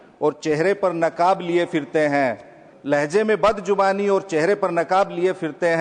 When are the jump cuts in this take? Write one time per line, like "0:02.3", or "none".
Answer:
none